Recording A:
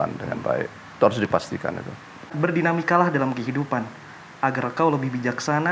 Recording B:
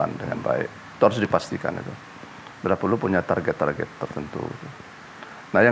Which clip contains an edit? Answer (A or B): A